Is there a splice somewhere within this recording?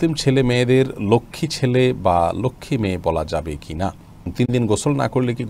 yes; 1 cut; at 4.3 s

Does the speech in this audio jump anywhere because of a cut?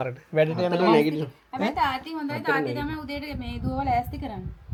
no; 0 cuts

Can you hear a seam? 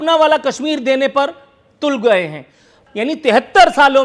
yes; 1 cut; at 2.8 s

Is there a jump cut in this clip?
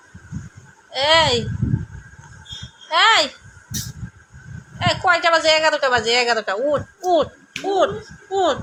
no; 0 cuts

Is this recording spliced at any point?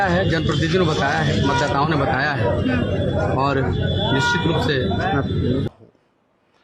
yes; 1 cut; at 5.7 s

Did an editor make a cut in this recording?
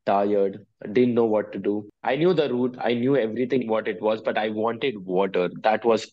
yes; 1 cut; at 1.9 s

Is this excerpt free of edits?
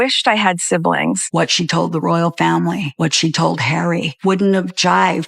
no; 1 cut; at 1.0 s

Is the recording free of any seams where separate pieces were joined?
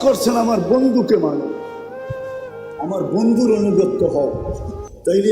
no; 2 cuts; at 1.6 s, 2.8 s

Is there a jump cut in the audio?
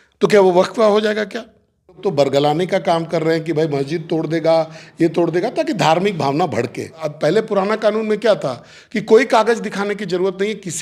yes; 2 cuts; at 2.0 s, 7.0 s

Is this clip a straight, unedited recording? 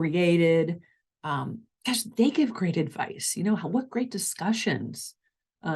yes; 0 cuts

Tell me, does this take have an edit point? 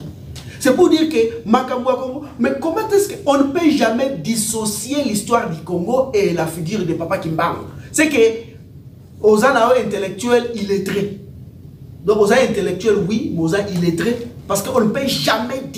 no; 0 cuts

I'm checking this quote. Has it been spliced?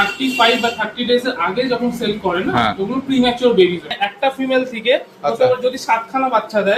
yes; 1 cut; at 3.9 s

